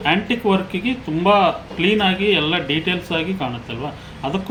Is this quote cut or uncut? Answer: uncut